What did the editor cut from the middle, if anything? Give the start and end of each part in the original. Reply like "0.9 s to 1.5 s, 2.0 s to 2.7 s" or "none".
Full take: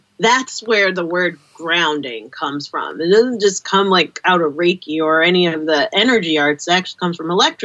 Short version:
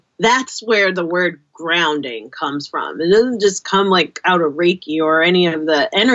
none